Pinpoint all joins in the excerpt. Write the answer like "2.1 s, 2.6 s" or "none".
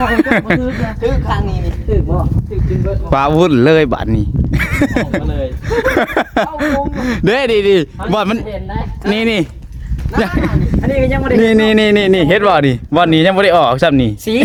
none